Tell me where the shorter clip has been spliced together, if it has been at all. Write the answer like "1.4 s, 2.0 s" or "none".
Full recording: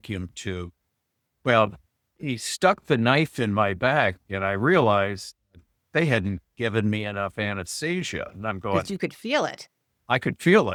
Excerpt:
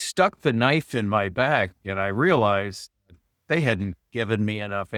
none